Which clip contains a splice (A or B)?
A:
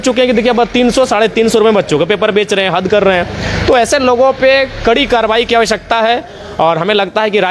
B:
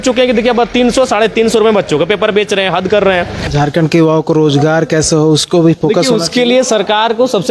B